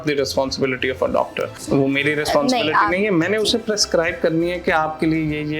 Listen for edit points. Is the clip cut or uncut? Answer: cut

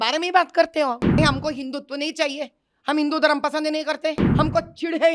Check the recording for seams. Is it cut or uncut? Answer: cut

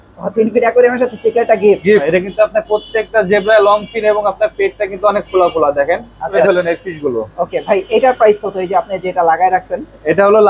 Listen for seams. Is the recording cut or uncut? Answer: cut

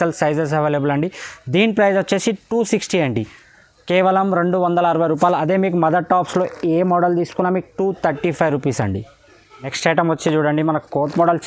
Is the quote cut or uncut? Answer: uncut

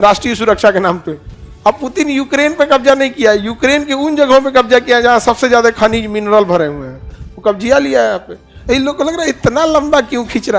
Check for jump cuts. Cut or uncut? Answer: cut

